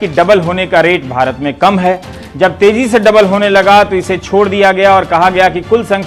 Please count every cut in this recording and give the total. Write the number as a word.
zero